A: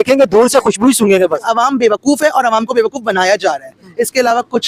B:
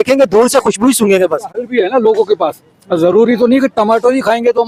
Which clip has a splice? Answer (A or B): A